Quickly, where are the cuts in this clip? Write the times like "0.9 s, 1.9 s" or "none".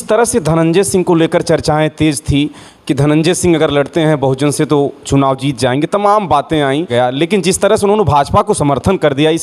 6.9 s